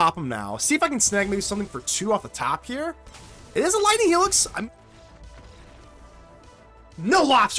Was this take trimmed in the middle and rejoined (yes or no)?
yes